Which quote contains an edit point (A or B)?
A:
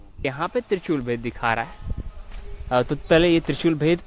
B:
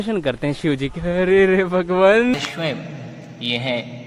B